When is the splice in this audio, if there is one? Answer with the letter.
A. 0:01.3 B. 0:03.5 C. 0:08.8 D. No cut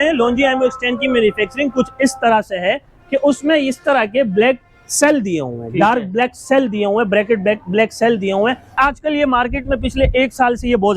C